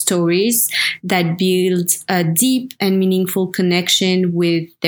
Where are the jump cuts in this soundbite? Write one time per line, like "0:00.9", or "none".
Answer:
none